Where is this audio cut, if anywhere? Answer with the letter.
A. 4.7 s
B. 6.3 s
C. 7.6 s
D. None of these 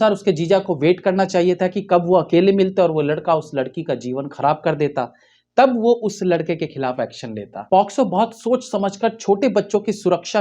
C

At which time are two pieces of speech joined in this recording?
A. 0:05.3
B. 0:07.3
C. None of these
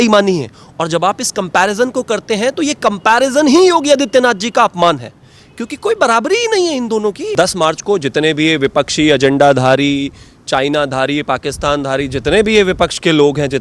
B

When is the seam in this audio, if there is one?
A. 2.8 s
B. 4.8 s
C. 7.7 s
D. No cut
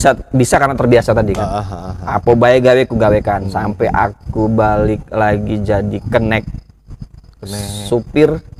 D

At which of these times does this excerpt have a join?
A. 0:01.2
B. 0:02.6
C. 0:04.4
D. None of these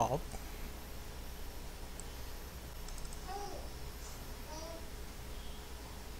D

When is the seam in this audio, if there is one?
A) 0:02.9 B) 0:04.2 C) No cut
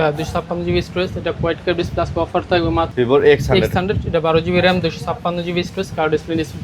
A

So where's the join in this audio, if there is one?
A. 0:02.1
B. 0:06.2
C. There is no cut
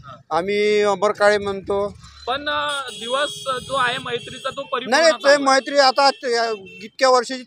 A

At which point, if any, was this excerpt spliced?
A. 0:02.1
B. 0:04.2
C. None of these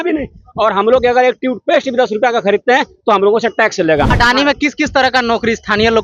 B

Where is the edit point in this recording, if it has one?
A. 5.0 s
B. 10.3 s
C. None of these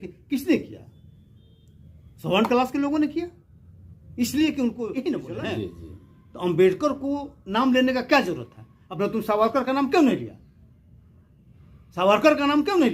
A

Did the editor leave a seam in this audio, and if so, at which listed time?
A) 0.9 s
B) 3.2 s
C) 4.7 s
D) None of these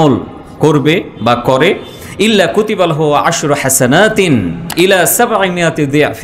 C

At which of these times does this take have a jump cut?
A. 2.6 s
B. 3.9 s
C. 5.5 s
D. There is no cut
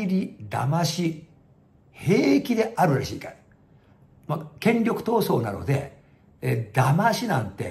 D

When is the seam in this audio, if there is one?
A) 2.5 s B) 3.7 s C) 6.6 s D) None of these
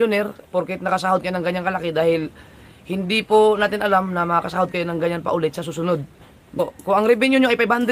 C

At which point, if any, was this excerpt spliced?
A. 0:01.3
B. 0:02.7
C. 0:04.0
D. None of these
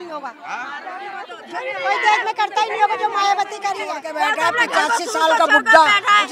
C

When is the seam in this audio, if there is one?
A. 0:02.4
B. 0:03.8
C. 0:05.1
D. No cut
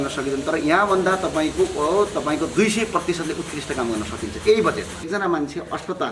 C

